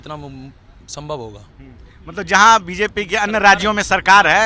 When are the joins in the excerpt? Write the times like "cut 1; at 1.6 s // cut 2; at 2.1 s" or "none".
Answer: none